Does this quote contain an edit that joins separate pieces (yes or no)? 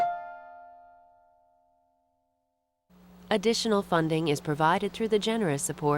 yes